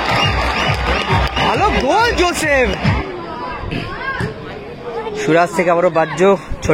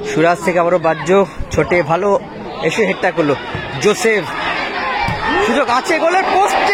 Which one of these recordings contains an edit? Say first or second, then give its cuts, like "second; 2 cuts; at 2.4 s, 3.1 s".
first; 1 cut; at 3.0 s